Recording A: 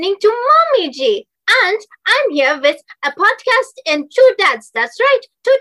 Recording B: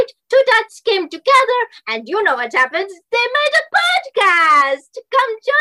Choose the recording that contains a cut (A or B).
A